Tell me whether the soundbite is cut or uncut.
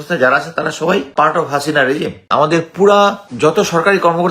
cut